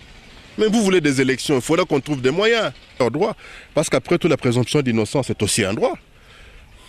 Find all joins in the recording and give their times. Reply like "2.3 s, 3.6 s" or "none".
3.0 s